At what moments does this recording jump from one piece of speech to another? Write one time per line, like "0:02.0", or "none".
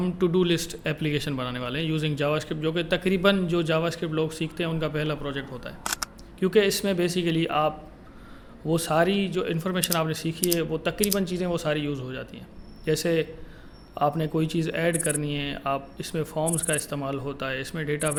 none